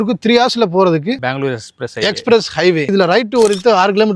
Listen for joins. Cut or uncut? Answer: cut